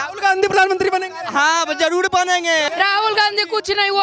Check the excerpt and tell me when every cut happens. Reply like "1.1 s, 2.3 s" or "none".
2.7 s